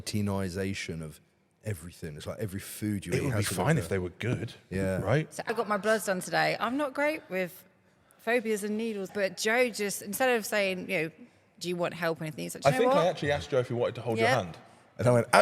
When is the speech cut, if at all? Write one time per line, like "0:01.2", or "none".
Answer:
0:05.5
0:09.1